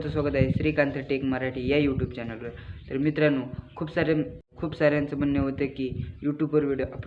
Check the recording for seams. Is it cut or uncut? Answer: cut